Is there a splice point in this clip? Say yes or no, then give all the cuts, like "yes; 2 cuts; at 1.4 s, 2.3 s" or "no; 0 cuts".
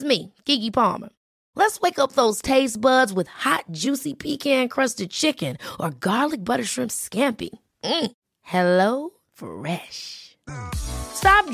no; 0 cuts